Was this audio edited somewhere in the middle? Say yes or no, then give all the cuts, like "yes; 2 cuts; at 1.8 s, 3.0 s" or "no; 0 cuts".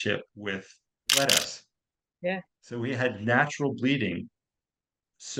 yes; 1 cut; at 1.1 s